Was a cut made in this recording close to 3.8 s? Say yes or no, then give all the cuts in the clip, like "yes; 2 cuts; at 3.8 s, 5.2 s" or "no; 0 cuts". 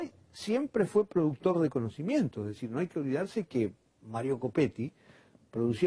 no; 0 cuts